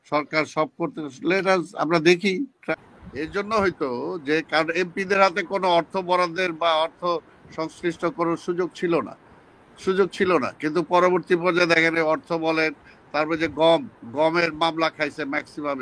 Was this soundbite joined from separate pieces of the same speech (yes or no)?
yes